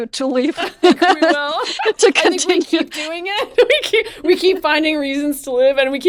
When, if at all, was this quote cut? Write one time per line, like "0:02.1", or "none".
none